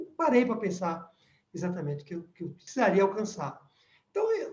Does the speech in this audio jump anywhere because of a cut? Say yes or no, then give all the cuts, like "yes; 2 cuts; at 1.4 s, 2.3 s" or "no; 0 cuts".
yes; 1 cut; at 2.6 s